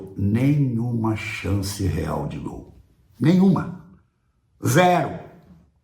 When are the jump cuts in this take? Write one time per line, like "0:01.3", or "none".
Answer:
none